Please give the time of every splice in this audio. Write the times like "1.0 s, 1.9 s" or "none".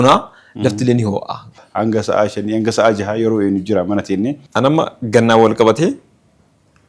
1.6 s, 4.4 s